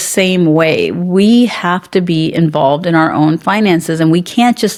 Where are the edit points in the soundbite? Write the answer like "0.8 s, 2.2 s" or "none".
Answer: none